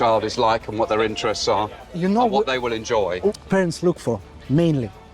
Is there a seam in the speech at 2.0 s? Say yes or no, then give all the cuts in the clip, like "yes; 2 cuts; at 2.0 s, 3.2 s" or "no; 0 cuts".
no; 1 cut; at 3.4 s